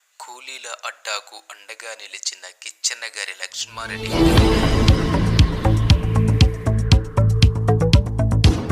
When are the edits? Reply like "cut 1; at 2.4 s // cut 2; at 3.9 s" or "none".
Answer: cut 1; at 0.9 s